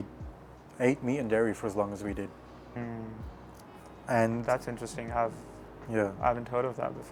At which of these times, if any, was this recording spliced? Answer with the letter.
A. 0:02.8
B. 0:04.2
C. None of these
A